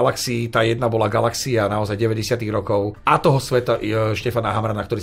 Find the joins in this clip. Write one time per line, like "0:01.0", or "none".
0:03.0